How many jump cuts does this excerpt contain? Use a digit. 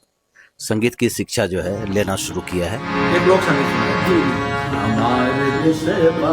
1